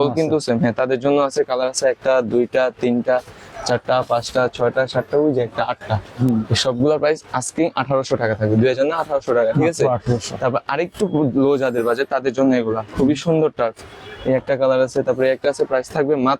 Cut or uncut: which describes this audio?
uncut